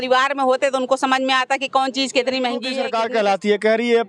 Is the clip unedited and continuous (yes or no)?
no